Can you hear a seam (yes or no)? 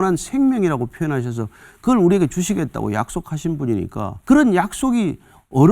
yes